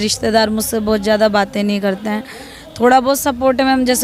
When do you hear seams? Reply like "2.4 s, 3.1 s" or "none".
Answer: none